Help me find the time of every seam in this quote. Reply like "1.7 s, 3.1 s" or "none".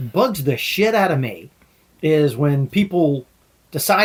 none